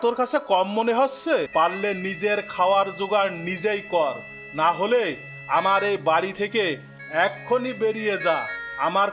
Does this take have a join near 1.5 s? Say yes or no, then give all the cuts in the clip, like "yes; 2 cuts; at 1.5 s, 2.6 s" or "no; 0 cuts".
yes; 1 cut; at 1.5 s